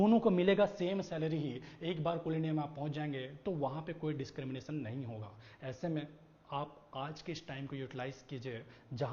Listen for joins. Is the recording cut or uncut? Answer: uncut